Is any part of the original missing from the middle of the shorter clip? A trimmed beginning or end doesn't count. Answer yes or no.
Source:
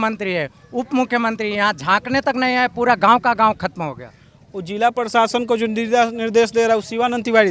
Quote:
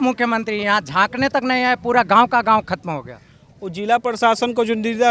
no